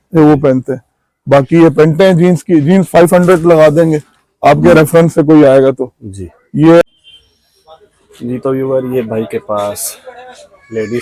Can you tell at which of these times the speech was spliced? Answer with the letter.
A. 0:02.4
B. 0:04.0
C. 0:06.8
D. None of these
C